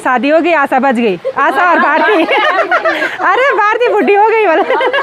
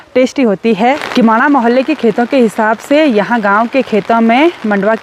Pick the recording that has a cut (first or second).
second